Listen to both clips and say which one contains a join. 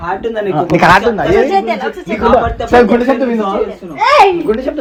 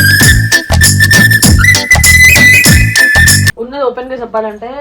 second; 1 cut; at 3.6 s

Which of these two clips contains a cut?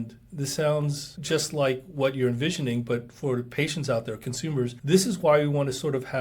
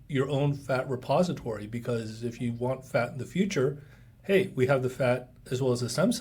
first; 2 cuts; at 1.1 s, 4.8 s

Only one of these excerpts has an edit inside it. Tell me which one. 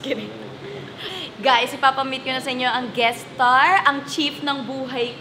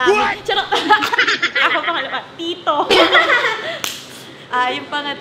first; 1 cut; at 1.1 s

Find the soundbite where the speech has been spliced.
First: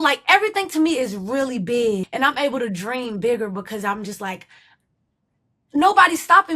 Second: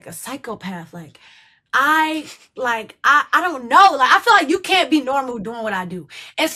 first; 1 cut; at 2.1 s

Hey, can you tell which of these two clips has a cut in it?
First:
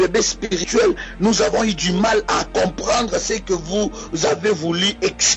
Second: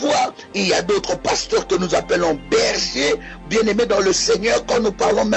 second; 1 cut; at 2.4 s

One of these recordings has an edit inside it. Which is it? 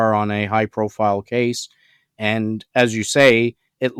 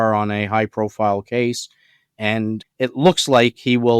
second; 1 cut; at 2.6 s

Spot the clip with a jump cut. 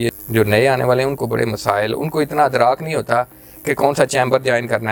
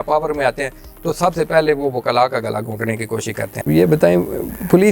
second; 1 cut; at 3.5 s

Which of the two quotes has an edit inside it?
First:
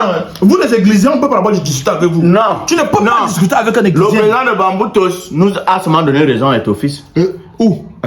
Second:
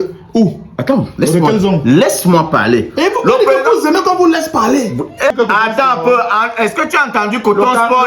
second; 1 cut; at 5.3 s

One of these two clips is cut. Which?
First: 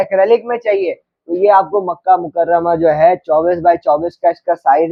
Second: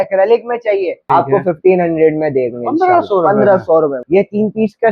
second; 2 cuts; at 1.0 s, 4.0 s

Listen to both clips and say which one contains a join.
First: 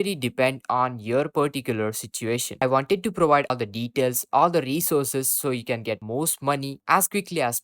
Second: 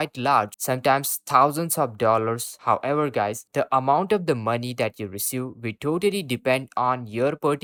first; 2 cuts; at 2.5 s, 3.5 s

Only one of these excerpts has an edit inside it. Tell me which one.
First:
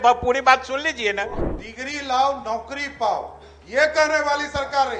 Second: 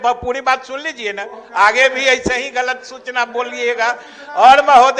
first; 1 cut; at 1.4 s

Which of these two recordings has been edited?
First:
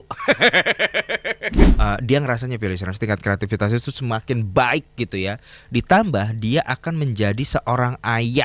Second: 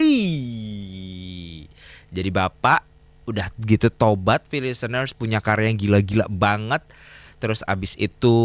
first; 1 cut; at 1.7 s

